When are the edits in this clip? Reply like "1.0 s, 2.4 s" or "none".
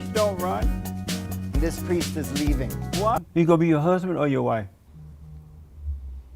3.2 s